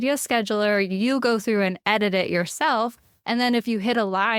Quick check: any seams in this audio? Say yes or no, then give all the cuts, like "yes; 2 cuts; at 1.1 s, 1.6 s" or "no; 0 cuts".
no; 0 cuts